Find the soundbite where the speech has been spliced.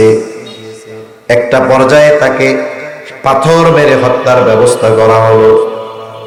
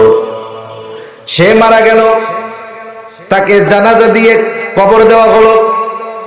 second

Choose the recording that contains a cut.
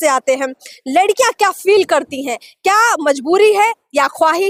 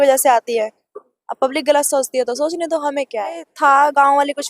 second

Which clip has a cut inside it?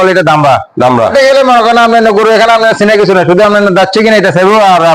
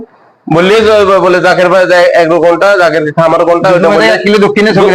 first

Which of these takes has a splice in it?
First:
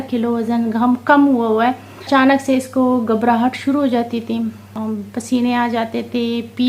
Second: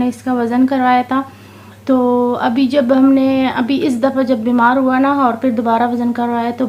first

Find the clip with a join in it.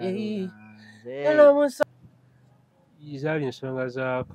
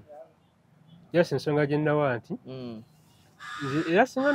first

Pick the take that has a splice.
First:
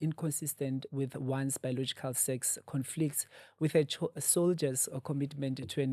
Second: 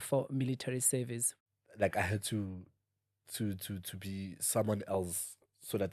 second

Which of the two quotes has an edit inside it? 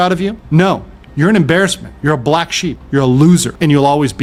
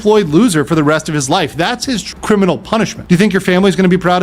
second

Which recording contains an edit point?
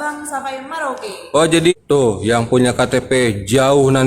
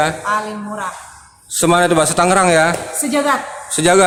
first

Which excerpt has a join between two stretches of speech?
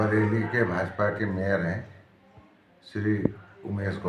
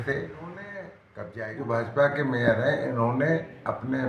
second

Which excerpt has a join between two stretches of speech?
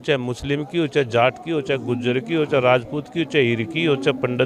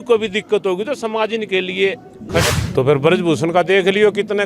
second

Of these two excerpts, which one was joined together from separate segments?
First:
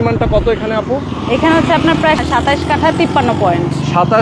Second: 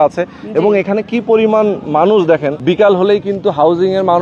second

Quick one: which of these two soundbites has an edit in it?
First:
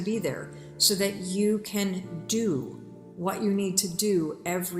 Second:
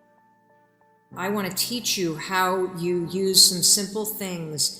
second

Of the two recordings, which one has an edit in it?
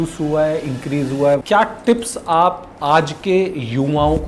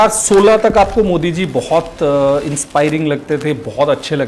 first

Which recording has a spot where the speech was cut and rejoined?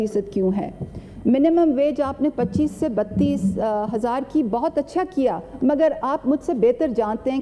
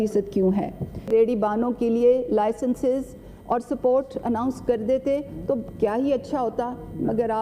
second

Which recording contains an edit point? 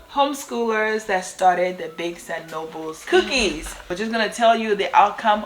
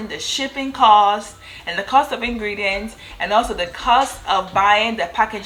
first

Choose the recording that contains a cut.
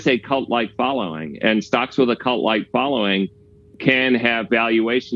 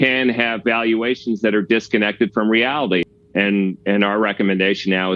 second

